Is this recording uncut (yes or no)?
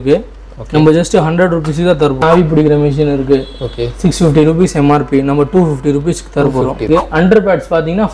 no